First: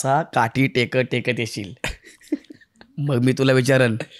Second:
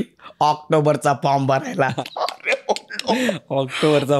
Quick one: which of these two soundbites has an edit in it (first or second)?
second